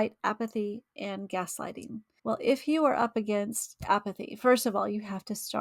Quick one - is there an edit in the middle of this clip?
yes; 1 cut; at 2.1 s

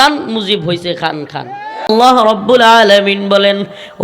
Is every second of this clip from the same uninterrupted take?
no; 1 cut; at 1.9 s

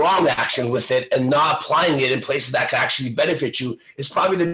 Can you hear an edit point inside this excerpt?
no; 0 cuts

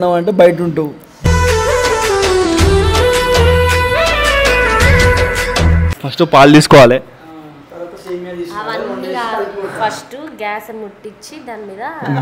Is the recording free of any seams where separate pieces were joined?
no; 2 cuts; at 1.0 s, 6.0 s

